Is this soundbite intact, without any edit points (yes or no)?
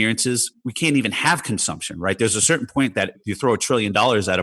yes